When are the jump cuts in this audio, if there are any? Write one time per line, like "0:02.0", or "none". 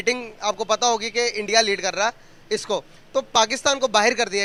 none